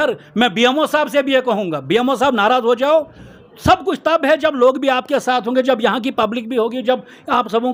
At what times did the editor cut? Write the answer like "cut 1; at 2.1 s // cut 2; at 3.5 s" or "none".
none

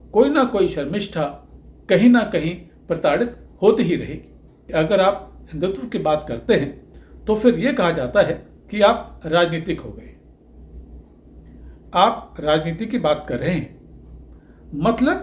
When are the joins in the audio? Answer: cut 1; at 4.6 s

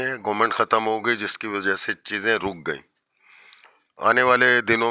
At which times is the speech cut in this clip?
none

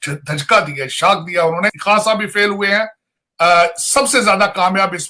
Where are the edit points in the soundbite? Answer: cut 1; at 1.8 s

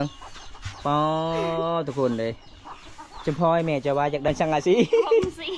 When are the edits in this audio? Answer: cut 1; at 4.3 s

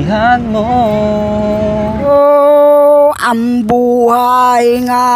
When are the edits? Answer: cut 1; at 2.0 s

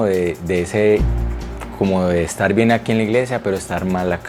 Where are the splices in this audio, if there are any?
none

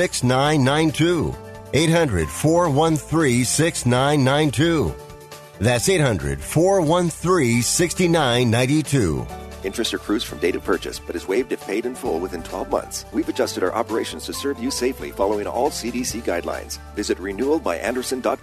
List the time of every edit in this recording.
cut 1; at 13.0 s

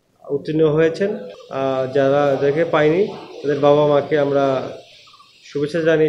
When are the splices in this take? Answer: cut 1; at 1.3 s

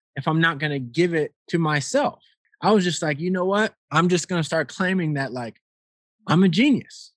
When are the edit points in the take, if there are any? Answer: cut 1; at 1.4 s // cut 2; at 2.4 s // cut 3; at 3.8 s

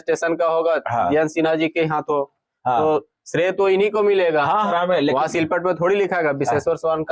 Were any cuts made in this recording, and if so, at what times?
cut 1; at 4.7 s

